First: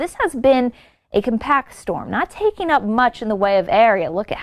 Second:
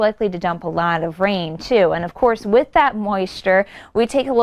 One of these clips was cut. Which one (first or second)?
first